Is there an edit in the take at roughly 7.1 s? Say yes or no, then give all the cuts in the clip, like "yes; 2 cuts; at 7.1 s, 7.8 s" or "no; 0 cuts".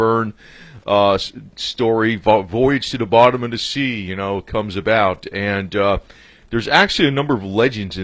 yes; 1 cut; at 7.1 s